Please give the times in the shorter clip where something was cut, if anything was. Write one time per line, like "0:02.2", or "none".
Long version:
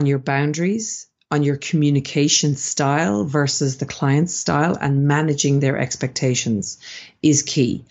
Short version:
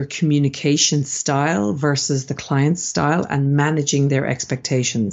none